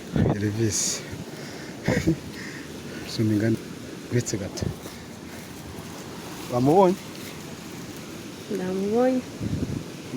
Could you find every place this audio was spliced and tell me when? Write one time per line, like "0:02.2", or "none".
0:03.6